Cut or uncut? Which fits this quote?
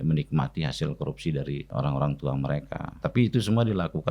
cut